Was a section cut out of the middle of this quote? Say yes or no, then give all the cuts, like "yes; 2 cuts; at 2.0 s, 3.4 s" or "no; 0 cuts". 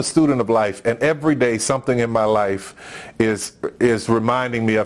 no; 0 cuts